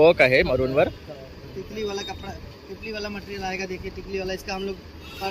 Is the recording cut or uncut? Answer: uncut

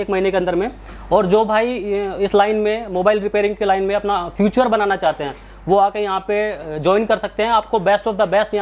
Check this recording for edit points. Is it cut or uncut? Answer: uncut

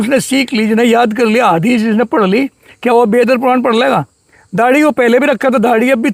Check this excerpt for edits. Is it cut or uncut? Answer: uncut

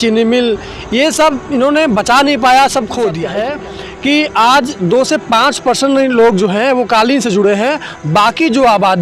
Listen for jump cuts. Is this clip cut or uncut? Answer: cut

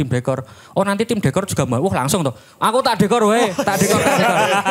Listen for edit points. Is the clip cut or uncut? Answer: uncut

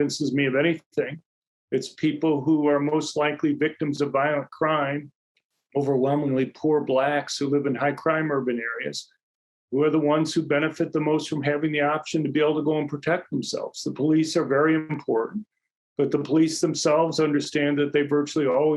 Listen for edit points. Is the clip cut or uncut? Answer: uncut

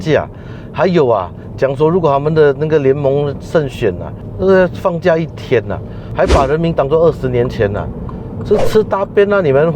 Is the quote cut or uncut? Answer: cut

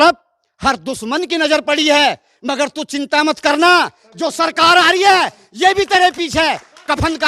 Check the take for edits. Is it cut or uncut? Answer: uncut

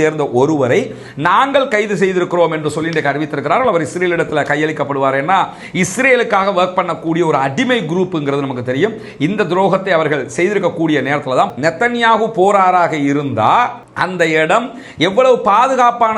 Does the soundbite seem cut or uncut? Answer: cut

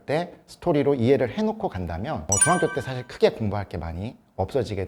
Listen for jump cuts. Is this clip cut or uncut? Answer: uncut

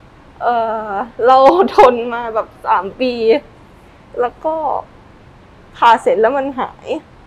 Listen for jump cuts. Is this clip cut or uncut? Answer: uncut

